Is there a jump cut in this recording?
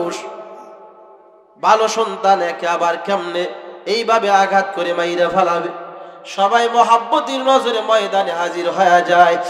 no; 0 cuts

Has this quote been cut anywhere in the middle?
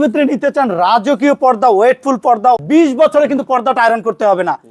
yes; 1 cut; at 2.6 s

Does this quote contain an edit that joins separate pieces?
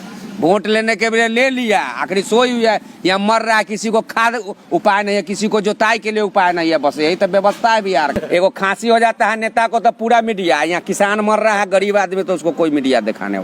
yes; 1 cut; at 8.1 s

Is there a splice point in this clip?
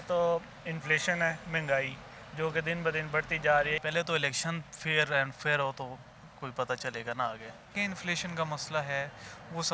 yes; 2 cuts; at 3.8 s, 7.6 s

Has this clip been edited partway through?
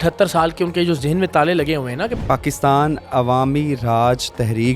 yes; 1 cut; at 2.2 s

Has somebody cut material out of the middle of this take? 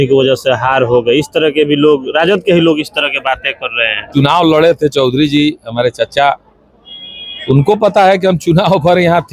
yes; 1 cut; at 4.1 s

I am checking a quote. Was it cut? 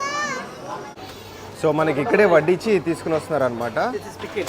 yes; 1 cut; at 1.0 s

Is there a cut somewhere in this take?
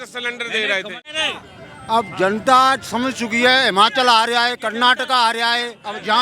yes; 1 cut; at 1.0 s

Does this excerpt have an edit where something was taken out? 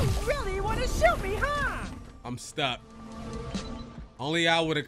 no; 0 cuts

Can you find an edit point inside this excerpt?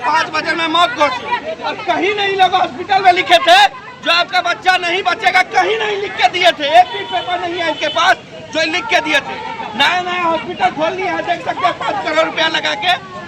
no; 0 cuts

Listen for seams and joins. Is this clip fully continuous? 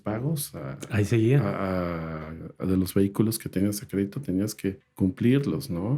no; 1 cut; at 4.9 s

